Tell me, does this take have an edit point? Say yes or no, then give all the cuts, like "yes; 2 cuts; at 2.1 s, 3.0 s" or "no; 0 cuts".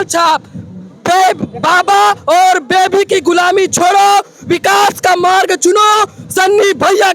no; 0 cuts